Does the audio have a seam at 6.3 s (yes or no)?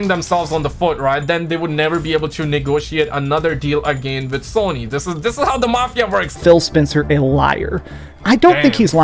yes